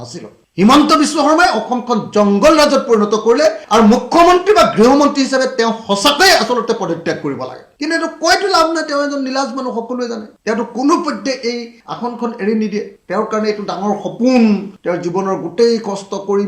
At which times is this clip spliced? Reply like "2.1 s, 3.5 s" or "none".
3.6 s